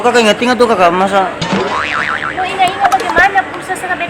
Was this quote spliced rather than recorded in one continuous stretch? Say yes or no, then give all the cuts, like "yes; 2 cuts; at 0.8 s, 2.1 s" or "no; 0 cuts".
no; 0 cuts